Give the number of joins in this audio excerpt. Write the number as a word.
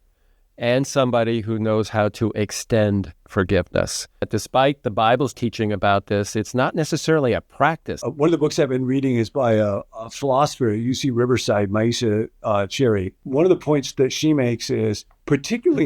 three